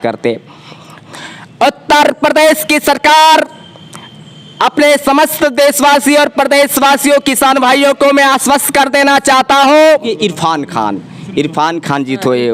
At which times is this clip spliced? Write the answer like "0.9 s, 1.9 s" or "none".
1.0 s, 9.9 s